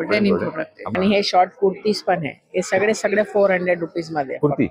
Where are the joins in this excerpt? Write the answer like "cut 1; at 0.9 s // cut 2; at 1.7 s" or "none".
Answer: cut 1; at 0.9 s